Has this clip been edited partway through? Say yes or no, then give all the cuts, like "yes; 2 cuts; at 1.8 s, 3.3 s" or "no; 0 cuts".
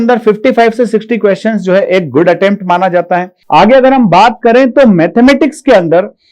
yes; 1 cut; at 3.3 s